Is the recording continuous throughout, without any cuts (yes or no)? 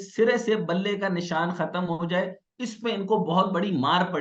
yes